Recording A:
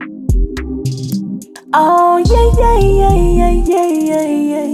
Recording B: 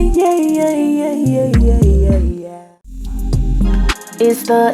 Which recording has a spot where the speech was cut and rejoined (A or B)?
B